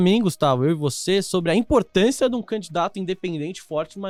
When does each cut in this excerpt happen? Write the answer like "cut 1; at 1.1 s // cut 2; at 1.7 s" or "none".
none